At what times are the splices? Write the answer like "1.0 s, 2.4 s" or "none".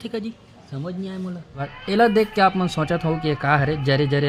1.7 s